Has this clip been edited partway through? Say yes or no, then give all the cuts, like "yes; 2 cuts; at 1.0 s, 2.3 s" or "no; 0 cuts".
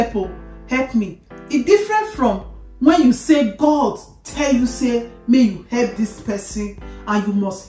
no; 0 cuts